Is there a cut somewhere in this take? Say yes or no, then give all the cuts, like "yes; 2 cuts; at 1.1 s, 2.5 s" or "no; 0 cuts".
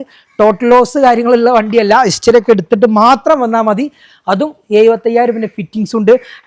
no; 0 cuts